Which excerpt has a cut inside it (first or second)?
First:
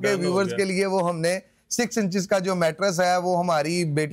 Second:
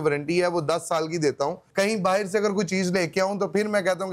second